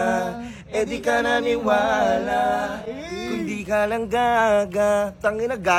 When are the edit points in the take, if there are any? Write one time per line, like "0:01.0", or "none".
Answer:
none